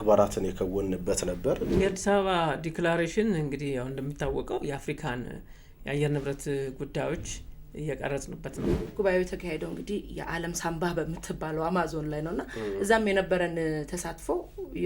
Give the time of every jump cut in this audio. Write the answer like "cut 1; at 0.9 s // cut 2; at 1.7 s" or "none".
cut 1; at 1.7 s // cut 2; at 8.8 s